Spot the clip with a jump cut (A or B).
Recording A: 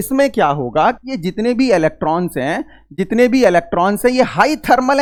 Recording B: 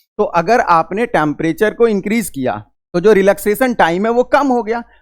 B